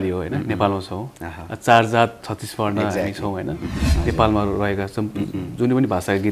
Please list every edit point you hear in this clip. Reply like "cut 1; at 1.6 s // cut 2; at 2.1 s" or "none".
cut 1; at 3.9 s